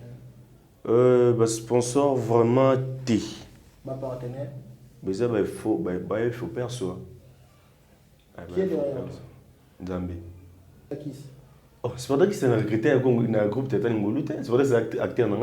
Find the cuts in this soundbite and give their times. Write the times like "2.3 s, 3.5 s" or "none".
10.9 s